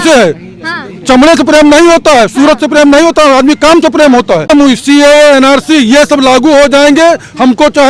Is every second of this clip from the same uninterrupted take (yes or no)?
no